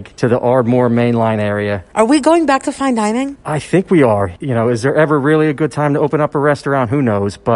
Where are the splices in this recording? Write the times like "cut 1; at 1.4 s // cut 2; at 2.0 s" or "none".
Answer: cut 1; at 1.9 s